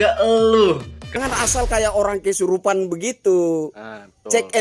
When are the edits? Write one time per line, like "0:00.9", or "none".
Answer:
0:01.2